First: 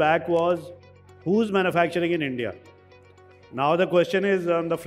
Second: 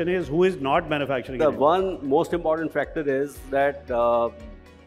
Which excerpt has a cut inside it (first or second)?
second